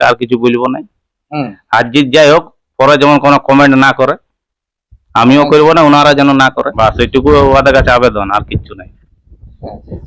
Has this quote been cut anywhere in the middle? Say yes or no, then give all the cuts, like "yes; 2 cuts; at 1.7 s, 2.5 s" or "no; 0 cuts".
yes; 1 cut; at 6.7 s